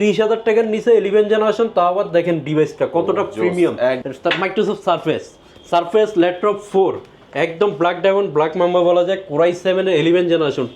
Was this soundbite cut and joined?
yes; 1 cut; at 4.0 s

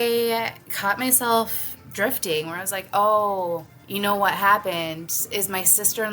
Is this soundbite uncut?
no; 1 cut; at 3.8 s

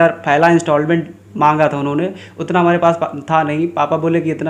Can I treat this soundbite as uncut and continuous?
yes; 0 cuts

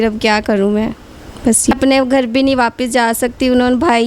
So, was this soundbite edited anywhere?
yes; 1 cut; at 1.7 s

